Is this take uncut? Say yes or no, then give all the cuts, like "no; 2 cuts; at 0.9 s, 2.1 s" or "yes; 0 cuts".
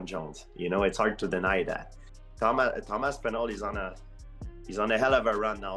no; 1 cut; at 2.0 s